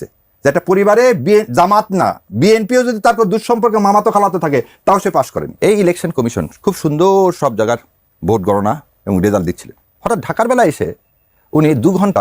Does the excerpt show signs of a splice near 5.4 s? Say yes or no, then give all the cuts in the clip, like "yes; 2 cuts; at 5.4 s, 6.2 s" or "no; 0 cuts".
yes; 1 cut; at 5.4 s